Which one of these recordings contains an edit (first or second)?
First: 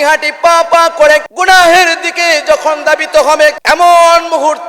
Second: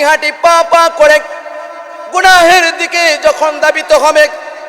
first